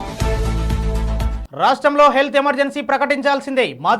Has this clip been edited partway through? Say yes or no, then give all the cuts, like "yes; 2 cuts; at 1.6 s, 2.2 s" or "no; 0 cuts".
yes; 1 cut; at 1.4 s